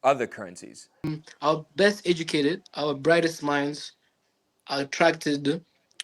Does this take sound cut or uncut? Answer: cut